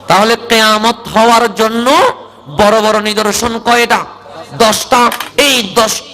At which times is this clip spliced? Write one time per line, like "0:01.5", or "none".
0:05.2